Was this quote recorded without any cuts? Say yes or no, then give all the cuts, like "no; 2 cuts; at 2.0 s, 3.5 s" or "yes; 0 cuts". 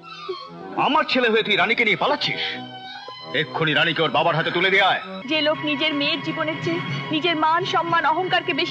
no; 1 cut; at 5.1 s